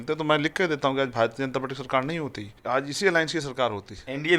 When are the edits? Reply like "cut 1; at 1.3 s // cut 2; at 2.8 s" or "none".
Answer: cut 1; at 2.6 s